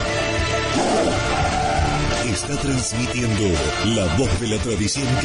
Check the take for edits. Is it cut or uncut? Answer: uncut